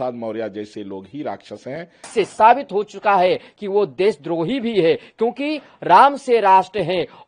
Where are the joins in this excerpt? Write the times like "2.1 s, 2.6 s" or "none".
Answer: 1.9 s